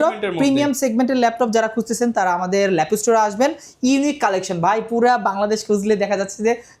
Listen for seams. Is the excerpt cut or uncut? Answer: uncut